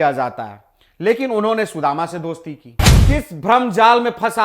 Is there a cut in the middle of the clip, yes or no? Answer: yes